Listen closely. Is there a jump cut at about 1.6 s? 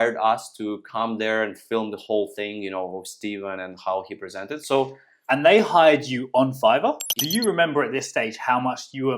no; 1 cut; at 7.1 s

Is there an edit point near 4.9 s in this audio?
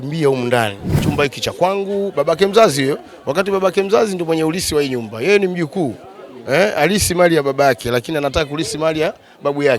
no; 1 cut; at 0.9 s

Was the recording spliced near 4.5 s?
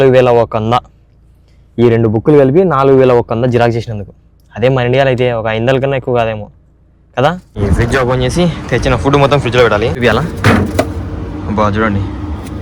no; 2 cuts; at 7.6 s, 10.0 s

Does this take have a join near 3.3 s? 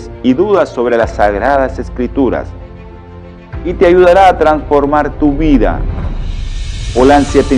no; 0 cuts

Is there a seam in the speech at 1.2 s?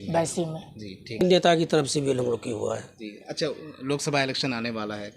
yes; 1 cut; at 1.2 s

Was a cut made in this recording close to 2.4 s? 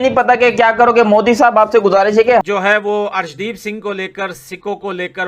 yes; 1 cut; at 2.4 s

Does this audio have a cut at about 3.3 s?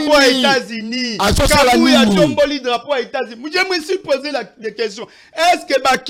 no; 0 cuts

